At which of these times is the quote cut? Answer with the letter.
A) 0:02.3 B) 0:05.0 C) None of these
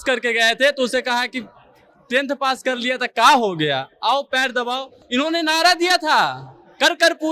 B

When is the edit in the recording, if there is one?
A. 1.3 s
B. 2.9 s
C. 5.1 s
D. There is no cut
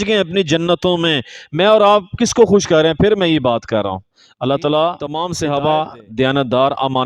C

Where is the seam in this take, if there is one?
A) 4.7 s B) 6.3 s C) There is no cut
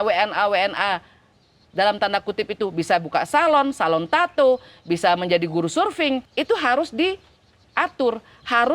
B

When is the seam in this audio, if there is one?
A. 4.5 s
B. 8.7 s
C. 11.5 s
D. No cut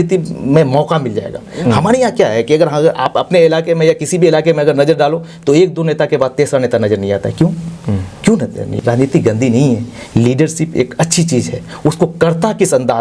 B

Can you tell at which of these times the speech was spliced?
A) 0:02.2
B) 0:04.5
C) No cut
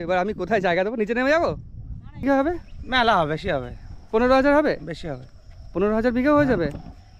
A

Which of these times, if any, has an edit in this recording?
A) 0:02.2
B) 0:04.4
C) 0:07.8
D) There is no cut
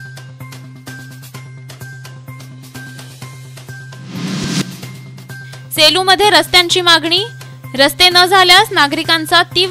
B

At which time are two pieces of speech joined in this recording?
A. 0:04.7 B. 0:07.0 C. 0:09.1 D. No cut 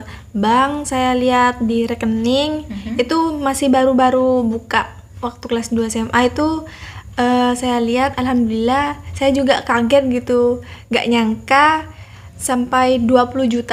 D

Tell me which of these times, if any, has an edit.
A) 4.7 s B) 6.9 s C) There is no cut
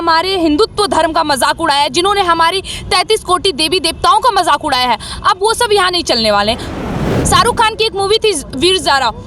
B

